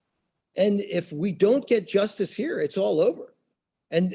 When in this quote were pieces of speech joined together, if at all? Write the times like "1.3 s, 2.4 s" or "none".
none